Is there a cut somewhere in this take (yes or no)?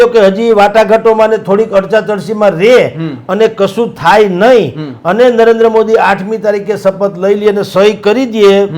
no